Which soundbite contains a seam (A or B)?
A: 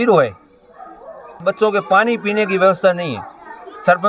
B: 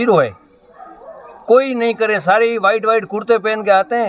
A